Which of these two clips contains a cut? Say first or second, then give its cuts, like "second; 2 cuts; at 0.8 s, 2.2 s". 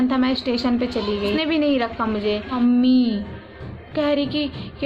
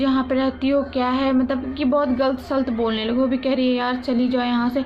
first; 2 cuts; at 1.4 s, 2.6 s